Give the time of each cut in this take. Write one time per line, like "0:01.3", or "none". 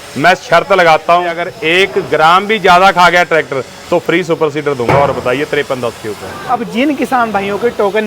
0:01.5
0:06.3